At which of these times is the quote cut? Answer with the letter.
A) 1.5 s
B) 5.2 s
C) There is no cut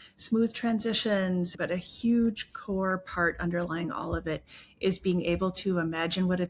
A